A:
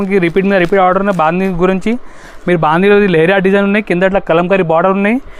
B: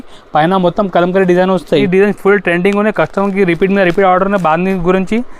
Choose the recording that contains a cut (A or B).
B